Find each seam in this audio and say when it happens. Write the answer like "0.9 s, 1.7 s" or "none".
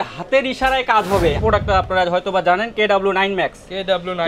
1.4 s